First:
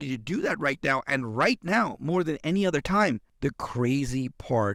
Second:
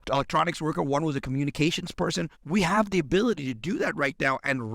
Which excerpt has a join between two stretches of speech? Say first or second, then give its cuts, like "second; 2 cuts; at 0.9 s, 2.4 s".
second; 1 cut; at 2.3 s